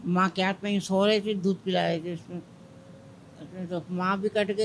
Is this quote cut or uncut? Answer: uncut